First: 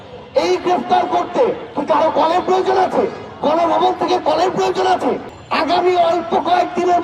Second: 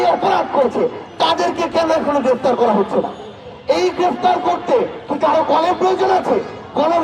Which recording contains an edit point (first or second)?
first